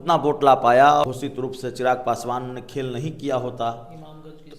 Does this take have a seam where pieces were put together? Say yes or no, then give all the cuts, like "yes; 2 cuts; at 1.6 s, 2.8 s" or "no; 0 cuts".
yes; 1 cut; at 1.0 s